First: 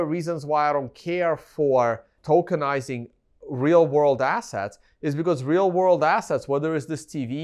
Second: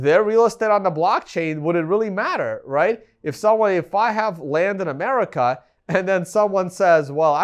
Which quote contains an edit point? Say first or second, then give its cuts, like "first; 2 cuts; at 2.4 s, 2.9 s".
first; 1 cut; at 2.1 s